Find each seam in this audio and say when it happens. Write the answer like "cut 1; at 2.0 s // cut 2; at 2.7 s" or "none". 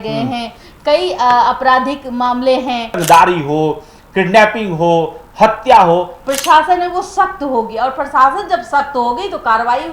cut 1; at 3.0 s // cut 2; at 6.2 s